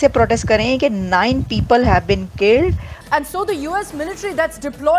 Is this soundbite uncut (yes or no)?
no